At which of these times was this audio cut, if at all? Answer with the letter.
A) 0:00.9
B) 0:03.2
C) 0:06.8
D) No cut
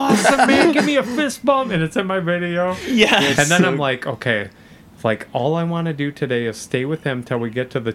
D